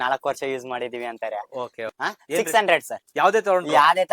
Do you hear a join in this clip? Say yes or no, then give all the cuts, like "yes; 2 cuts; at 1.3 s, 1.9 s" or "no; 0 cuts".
yes; 1 cut; at 1.8 s